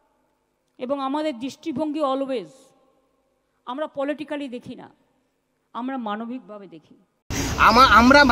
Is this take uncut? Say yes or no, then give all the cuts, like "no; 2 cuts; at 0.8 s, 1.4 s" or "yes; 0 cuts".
no; 1 cut; at 7.4 s